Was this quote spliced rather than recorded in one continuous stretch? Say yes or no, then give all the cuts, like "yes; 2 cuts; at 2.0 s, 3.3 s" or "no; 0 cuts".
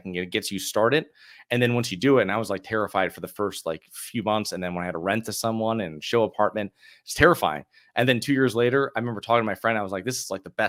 no; 0 cuts